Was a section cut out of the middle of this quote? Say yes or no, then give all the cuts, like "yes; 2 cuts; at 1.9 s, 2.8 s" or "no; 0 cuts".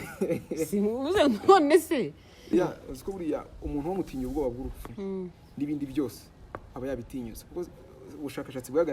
yes; 1 cut; at 2.5 s